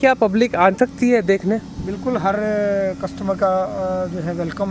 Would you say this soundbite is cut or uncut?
uncut